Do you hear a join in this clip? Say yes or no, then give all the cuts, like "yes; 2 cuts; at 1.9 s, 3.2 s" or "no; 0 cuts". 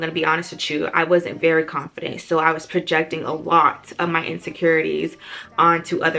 no; 0 cuts